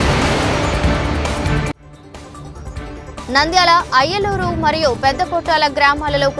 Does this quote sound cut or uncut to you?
uncut